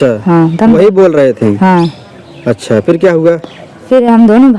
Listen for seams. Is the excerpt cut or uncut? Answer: uncut